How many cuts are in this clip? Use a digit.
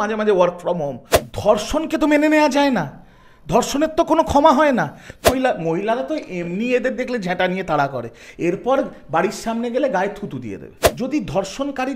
3